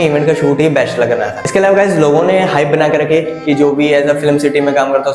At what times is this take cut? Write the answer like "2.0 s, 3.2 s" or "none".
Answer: none